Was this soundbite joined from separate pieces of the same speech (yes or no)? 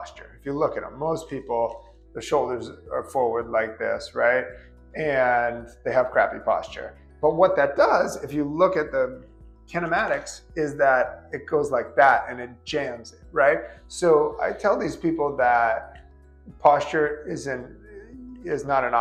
no